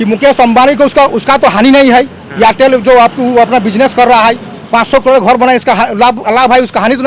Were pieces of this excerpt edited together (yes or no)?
no